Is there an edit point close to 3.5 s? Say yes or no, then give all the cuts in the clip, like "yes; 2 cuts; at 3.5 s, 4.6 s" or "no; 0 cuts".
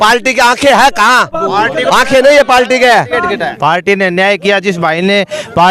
yes; 1 cut; at 3.5 s